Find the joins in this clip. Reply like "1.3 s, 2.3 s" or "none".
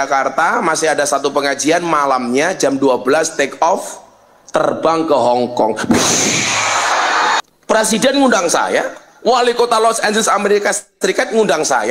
7.4 s